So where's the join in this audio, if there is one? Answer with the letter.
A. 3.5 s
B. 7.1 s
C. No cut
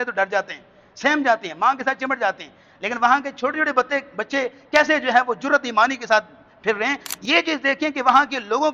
B